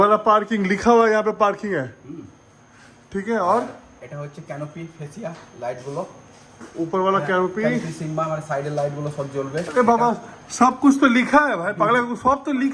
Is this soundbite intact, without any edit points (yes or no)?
yes